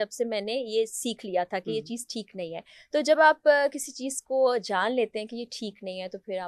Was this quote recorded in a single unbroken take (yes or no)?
yes